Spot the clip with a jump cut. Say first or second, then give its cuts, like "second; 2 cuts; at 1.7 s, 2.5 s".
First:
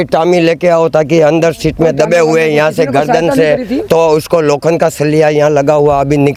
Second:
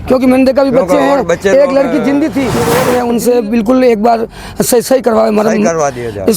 second; 1 cut; at 2.7 s